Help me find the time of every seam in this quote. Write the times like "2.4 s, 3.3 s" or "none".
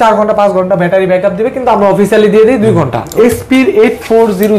3.1 s